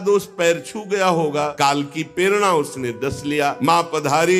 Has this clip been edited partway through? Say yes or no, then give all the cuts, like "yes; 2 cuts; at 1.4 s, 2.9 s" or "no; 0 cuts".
yes; 2 cuts; at 1.5 s, 3.6 s